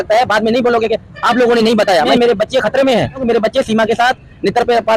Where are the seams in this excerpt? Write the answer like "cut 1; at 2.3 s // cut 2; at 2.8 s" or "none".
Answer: cut 1; at 2.1 s // cut 2; at 3.2 s